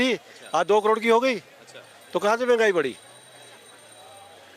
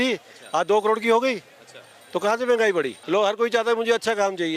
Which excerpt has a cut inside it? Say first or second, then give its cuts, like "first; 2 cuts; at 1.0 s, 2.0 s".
second; 1 cut; at 3.0 s